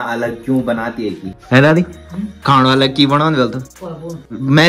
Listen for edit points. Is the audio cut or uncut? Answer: uncut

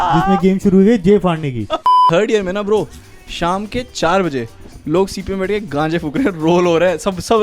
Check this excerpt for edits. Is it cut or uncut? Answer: cut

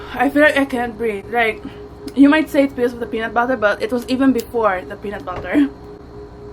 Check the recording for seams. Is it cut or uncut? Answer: uncut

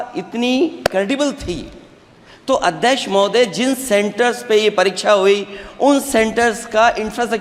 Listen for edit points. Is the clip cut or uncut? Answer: uncut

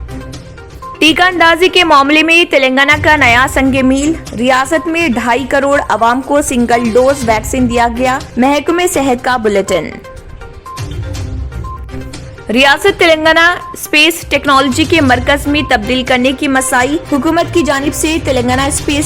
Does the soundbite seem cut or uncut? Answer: uncut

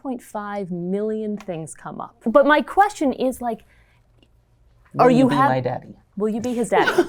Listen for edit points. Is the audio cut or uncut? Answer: uncut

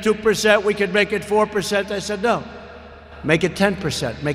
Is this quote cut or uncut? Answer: uncut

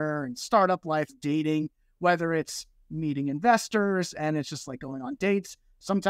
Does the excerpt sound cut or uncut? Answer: cut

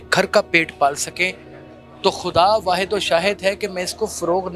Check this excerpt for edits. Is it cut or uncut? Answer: uncut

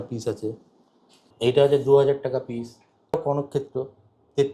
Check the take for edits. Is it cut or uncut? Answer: cut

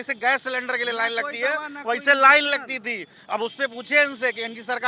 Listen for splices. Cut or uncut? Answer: uncut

